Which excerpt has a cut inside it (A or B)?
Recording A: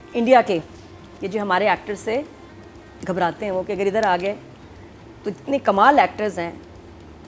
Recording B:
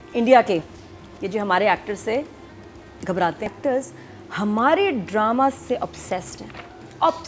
B